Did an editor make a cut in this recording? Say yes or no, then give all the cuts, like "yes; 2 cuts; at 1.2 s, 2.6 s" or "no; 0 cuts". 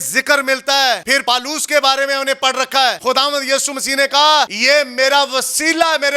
yes; 3 cuts; at 1.1 s, 3.0 s, 4.6 s